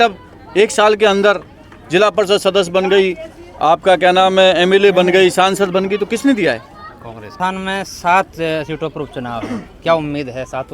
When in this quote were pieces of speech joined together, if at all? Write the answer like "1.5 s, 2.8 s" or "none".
7.3 s